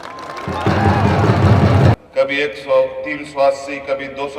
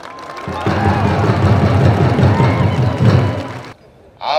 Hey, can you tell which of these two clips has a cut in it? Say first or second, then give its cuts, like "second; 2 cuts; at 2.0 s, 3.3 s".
first; 1 cut; at 1.9 s